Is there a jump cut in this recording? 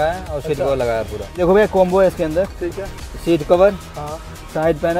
yes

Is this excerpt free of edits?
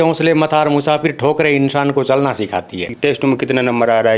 no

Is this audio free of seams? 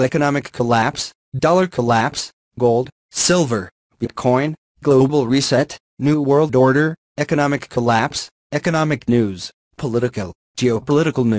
yes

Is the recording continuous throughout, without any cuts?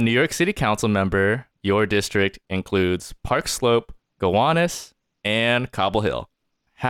no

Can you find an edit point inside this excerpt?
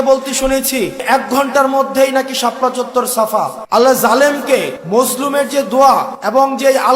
yes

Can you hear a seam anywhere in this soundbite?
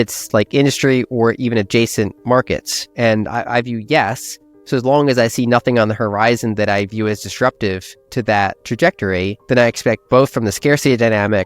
yes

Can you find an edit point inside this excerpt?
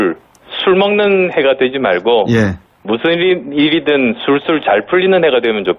yes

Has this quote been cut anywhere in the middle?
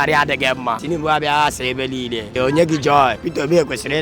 yes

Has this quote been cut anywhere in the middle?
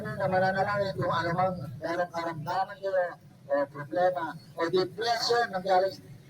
yes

